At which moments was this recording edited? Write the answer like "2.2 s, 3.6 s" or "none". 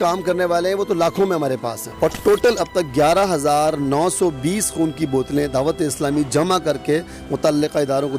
1.8 s